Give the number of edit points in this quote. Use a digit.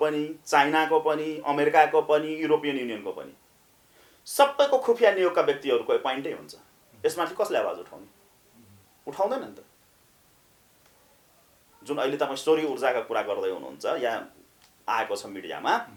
0